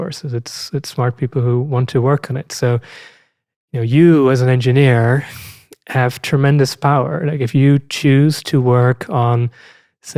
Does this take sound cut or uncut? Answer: uncut